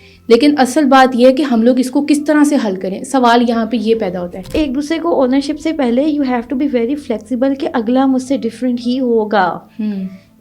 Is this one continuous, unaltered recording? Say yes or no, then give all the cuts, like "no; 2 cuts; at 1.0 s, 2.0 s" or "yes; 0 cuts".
no; 1 cut; at 4.5 s